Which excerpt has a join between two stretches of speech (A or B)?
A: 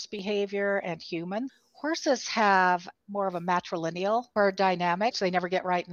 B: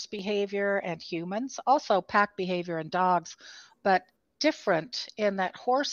A